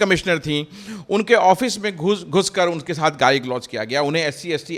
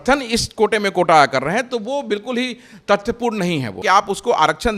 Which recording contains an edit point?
second; 1 cut; at 3.8 s

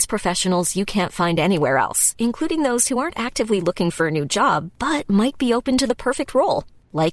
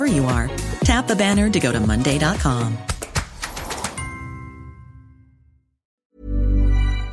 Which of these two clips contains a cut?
second; 1 cut; at 5.9 s

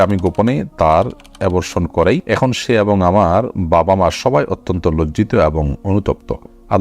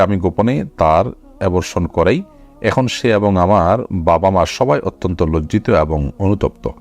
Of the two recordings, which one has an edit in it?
first; 1 cut; at 2.2 s

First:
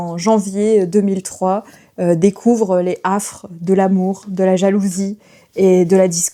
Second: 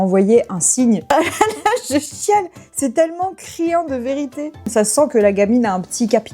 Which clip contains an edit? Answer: second; 2 cuts; at 1.0 s, 4.7 s

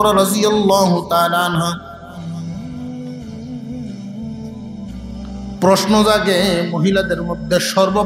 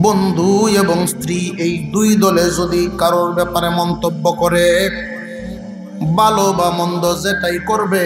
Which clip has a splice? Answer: first; 3 cuts; at 1.9 s, 3.5 s, 5.2 s

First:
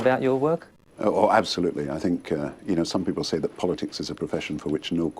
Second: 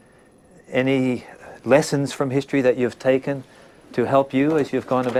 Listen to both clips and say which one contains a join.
first; 1 cut; at 2.2 s

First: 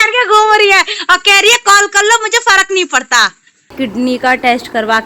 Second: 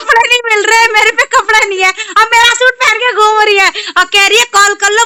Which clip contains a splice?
first; 1 cut; at 3.7 s

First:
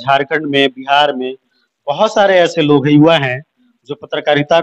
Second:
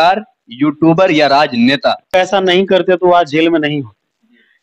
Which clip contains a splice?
second; 1 cut; at 2.2 s

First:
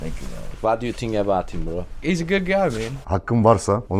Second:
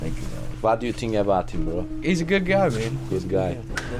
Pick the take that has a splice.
first; 1 cut; at 3.0 s

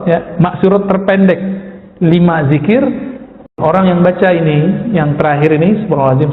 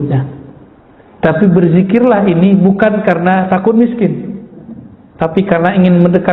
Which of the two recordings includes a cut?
first; 1 cut; at 3.5 s

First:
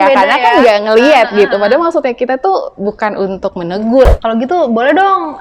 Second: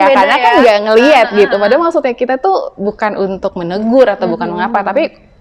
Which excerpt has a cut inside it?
first; 1 cut; at 4.1 s

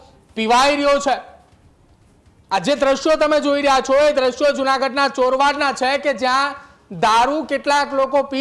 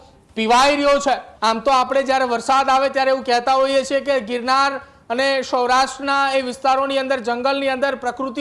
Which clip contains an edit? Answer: second; 1 cut; at 1.3 s

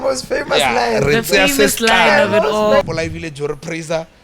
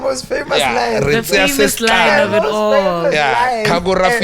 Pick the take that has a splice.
first; 1 cut; at 2.8 s

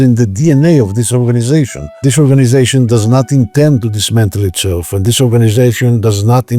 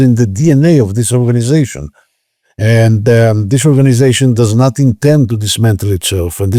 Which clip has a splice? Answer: first; 1 cut; at 1.9 s

